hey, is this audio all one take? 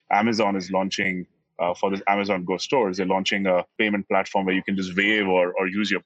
no; 1 cut; at 3.7 s

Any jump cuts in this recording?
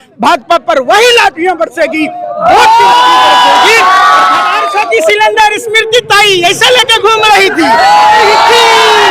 yes; 1 cut; at 4.6 s

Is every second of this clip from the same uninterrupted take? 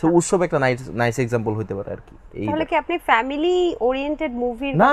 yes; 0 cuts

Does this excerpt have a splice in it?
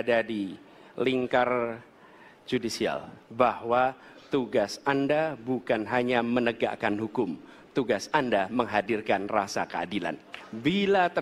yes; 1 cut; at 10.3 s

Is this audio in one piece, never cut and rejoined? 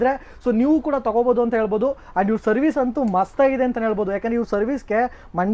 yes; 0 cuts

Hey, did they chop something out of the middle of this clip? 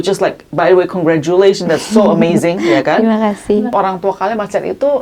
yes; 1 cut; at 3.7 s

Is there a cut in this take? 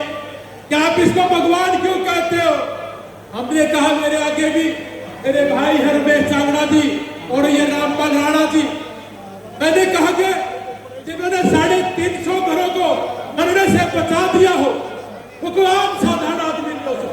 no; 0 cuts

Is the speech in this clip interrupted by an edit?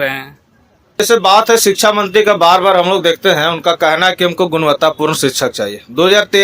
yes; 1 cut; at 0.9 s

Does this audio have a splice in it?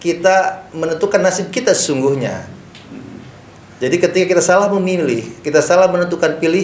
no; 0 cuts

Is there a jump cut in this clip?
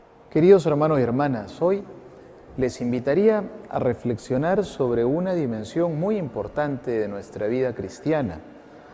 no; 0 cuts

